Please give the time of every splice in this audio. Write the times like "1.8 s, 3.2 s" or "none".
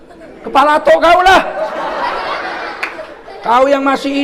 none

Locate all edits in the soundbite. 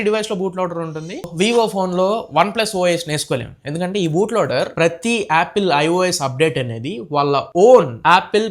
1.3 s, 4.7 s

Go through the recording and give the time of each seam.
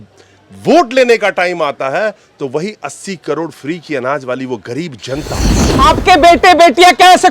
5.6 s

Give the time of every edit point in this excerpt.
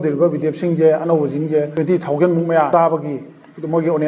1.7 s, 2.7 s

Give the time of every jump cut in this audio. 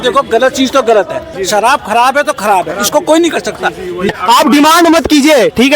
1.3 s, 4.1 s

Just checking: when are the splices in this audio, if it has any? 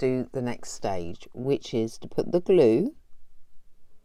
none

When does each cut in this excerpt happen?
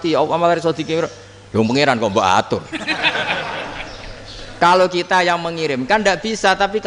none

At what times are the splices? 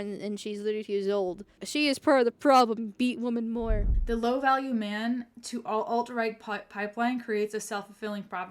1.6 s, 3.9 s

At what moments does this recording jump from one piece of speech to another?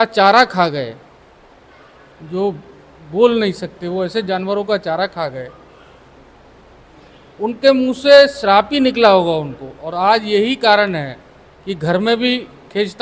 none

